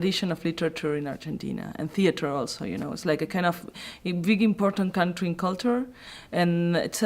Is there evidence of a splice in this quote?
yes; 1 cut; at 1.3 s

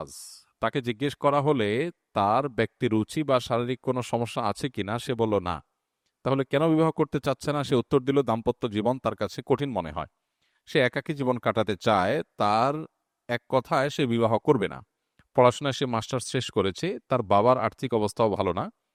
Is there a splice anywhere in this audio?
no; 0 cuts

